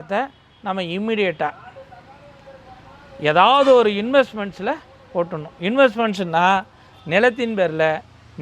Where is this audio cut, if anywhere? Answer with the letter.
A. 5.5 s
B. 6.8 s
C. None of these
C